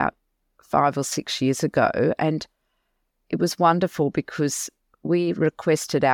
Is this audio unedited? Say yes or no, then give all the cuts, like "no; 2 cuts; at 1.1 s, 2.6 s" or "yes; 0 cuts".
yes; 0 cuts